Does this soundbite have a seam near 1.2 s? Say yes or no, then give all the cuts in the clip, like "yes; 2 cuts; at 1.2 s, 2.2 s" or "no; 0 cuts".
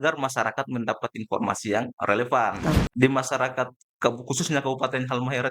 no; 1 cut; at 2.6 s